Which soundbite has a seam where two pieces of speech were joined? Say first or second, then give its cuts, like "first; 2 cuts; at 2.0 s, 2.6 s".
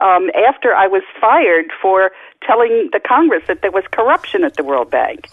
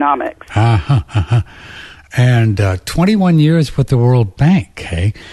first; 1 cut; at 2.3 s